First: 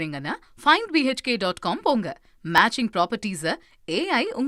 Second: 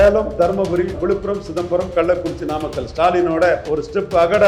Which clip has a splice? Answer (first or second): second